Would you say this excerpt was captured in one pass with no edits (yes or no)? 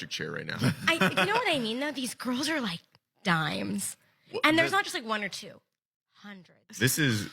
no